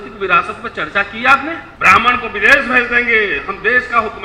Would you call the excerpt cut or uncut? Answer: cut